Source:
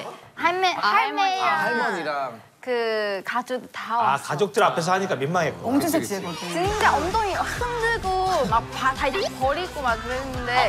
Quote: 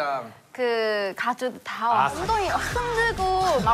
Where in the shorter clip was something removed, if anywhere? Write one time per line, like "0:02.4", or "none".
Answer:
0:02.2